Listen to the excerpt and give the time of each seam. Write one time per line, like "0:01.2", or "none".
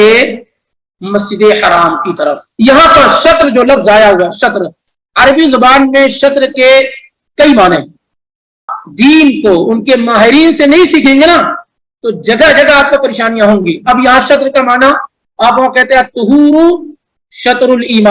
0:02.4
0:08.8